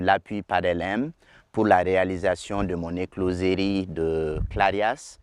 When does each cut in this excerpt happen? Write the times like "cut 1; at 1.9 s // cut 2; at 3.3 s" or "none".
none